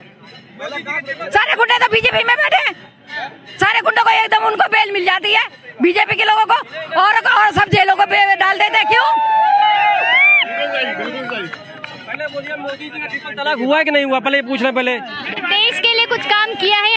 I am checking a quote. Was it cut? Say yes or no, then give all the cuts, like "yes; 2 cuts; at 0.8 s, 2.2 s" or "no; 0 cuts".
no; 0 cuts